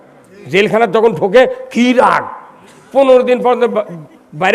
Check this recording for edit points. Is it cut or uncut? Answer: uncut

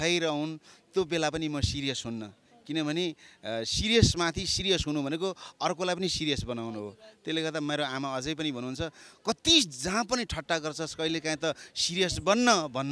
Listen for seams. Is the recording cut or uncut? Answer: uncut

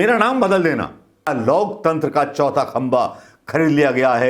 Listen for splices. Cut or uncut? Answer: cut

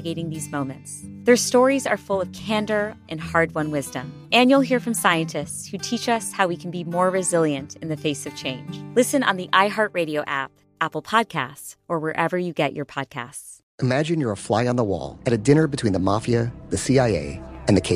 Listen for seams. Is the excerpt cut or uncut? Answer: uncut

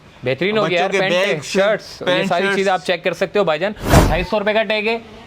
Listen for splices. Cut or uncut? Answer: cut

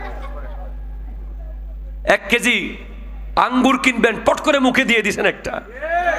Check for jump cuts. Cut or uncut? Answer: uncut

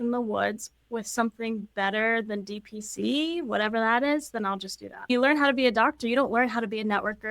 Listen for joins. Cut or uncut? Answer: cut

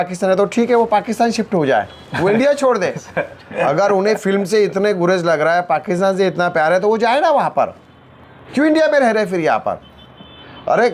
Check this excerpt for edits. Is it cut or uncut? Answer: uncut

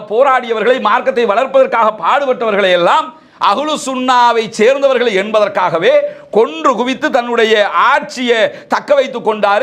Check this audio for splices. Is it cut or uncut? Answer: uncut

